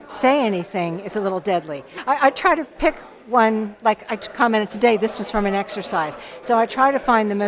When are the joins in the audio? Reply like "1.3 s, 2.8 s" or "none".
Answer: 1.9 s